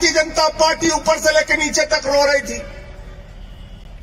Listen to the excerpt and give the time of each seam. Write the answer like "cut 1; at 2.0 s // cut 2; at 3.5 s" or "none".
none